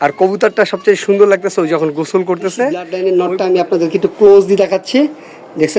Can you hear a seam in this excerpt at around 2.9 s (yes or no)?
yes